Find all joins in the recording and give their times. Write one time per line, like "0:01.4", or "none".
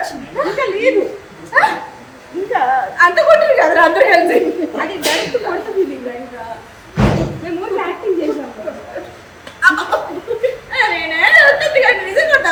none